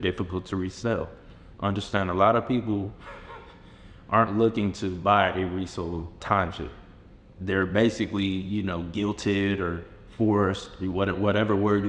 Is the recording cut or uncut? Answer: cut